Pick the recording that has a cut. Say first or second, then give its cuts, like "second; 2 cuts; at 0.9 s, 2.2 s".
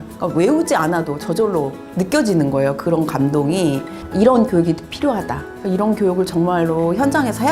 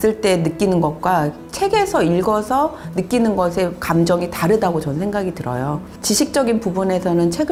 first; 2 cuts; at 1.8 s, 3.9 s